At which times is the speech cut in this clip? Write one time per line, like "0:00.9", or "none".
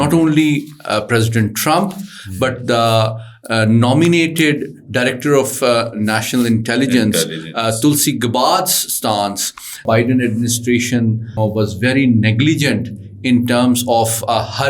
0:09.8
0:11.4